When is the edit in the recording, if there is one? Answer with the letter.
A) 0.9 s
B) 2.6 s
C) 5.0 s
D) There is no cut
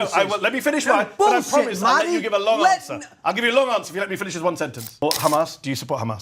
C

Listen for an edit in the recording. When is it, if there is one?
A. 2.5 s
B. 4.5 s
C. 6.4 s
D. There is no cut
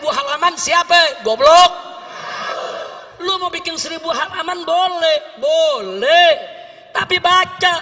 A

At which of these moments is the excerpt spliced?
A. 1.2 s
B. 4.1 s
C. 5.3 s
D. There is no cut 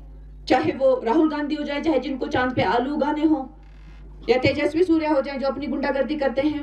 C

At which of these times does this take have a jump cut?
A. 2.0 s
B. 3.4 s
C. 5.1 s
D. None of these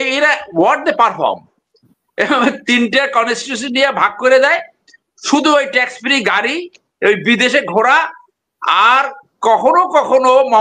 D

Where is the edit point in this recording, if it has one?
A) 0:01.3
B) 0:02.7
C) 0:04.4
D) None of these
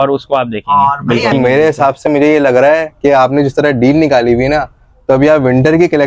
A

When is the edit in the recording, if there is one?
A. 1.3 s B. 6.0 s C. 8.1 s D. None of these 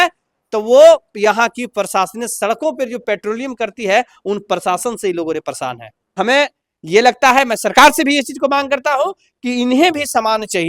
B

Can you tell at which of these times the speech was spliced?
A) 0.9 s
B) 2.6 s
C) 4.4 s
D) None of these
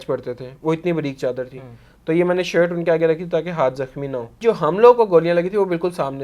C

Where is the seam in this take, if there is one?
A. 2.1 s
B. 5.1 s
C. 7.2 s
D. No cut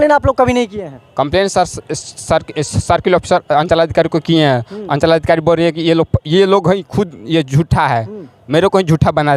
D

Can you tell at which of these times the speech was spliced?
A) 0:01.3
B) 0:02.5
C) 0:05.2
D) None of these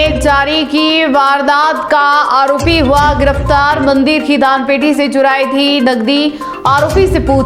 D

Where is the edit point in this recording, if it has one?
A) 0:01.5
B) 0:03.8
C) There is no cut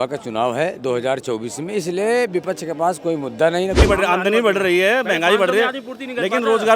B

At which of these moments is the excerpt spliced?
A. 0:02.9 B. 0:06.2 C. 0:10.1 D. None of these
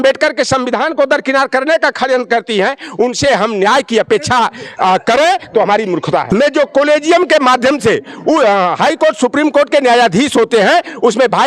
B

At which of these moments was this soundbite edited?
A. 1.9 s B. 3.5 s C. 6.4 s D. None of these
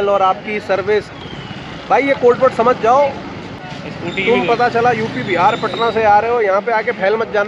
B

